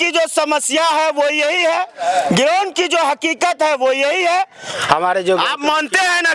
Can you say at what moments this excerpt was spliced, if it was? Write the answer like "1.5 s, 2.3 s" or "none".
4.7 s